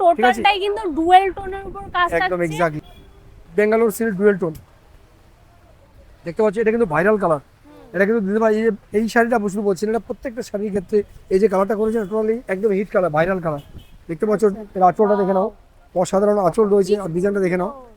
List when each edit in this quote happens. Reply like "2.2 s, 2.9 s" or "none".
2.8 s